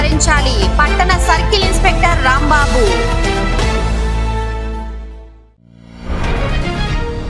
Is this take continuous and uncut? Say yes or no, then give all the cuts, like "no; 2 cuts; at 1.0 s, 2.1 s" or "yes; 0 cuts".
no; 1 cut; at 5.5 s